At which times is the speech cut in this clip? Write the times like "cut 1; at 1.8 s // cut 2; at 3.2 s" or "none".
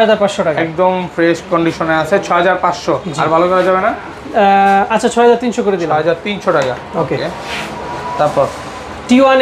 none